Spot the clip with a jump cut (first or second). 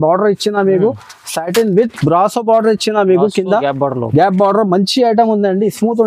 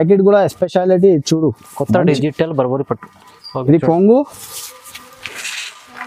second